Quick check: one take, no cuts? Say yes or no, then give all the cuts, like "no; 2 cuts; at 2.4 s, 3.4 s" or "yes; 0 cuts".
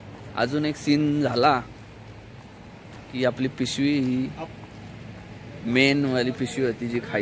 yes; 0 cuts